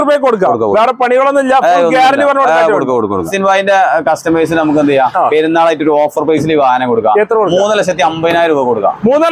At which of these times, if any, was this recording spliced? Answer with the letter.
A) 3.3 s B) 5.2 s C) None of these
A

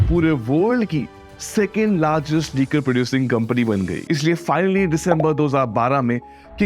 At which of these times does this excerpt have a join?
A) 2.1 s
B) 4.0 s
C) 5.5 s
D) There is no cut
B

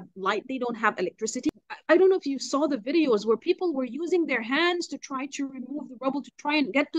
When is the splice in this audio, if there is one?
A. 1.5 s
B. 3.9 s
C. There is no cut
A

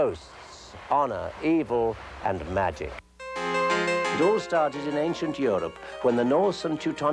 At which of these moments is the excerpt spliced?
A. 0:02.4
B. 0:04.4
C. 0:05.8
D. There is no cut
B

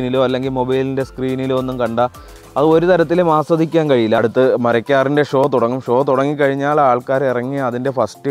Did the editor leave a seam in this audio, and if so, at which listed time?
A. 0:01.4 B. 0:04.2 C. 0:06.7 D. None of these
B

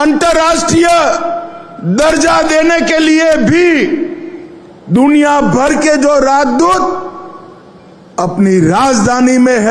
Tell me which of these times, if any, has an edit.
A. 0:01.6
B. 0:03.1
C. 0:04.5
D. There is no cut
D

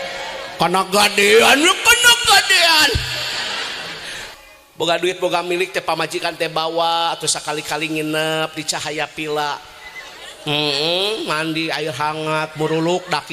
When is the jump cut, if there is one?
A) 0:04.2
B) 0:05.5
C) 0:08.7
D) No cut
A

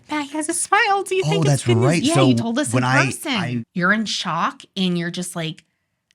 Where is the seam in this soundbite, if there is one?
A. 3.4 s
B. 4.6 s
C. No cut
A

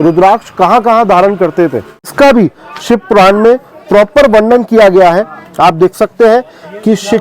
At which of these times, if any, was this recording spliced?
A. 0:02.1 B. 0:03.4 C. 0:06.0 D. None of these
A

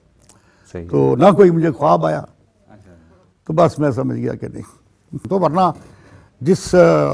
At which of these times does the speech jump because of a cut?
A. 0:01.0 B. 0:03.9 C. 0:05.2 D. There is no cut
C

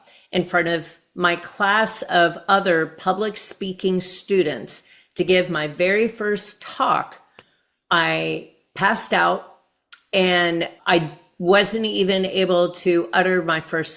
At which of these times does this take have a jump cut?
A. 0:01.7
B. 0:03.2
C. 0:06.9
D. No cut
D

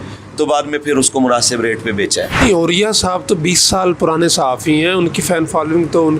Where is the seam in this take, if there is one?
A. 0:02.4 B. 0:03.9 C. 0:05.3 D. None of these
A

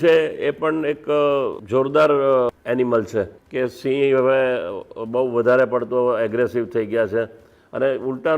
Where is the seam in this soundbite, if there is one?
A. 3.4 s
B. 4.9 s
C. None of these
A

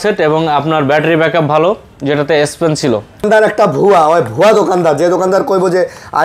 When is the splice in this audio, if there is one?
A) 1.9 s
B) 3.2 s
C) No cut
B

